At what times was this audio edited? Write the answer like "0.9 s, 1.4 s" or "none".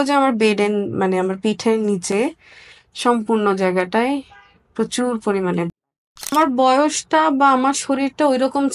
6.3 s